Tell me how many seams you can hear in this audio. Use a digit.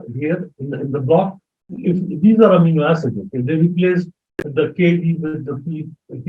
1